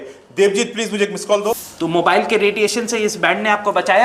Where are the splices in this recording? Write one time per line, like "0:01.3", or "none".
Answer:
0:01.7